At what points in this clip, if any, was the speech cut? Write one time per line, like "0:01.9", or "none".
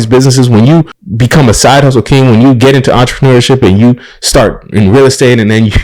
0:01.0